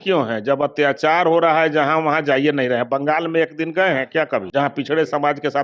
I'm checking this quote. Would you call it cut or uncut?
cut